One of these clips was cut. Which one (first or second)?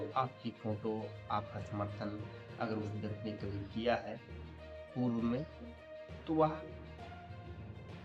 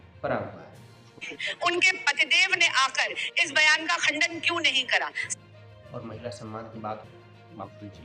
second